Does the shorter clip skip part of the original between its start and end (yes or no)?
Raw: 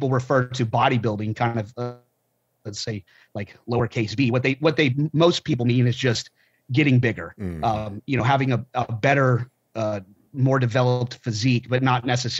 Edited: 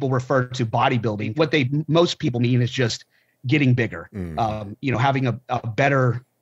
yes